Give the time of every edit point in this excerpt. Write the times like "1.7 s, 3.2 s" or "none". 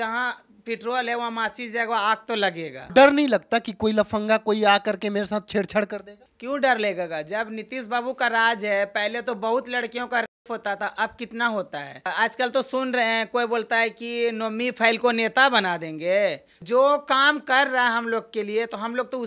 2.8 s, 12.0 s